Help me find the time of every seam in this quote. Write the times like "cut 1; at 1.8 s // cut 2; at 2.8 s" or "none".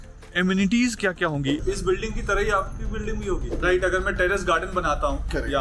cut 1; at 1.6 s // cut 2; at 3.6 s

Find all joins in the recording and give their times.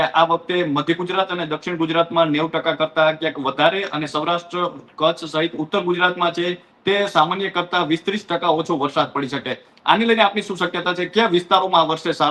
none

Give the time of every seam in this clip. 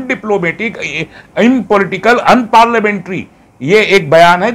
none

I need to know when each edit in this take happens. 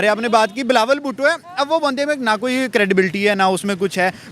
none

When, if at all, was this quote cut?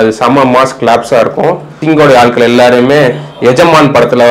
cut 1; at 1.8 s

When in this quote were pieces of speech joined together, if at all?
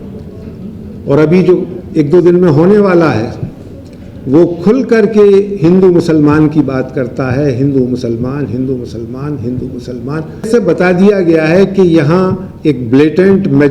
cut 1; at 10.5 s

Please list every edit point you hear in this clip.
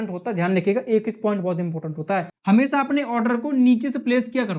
cut 1; at 2.3 s

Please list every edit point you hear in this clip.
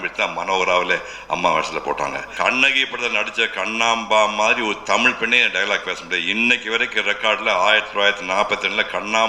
cut 1; at 2.3 s

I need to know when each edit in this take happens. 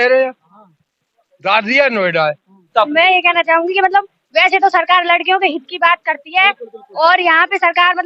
cut 1; at 2.7 s

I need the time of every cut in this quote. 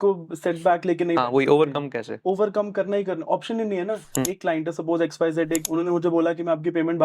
cut 1; at 4.3 s // cut 2; at 5.6 s

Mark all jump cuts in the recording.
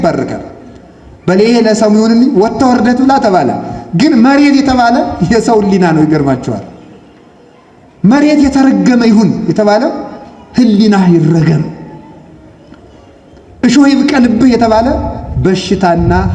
none

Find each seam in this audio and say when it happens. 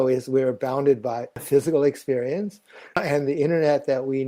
cut 1; at 1.4 s // cut 2; at 3.0 s

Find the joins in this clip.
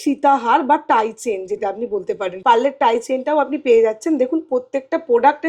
cut 1; at 2.3 s

